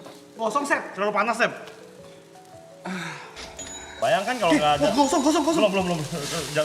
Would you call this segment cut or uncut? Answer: cut